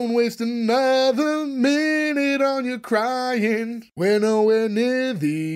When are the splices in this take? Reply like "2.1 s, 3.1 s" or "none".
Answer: 3.8 s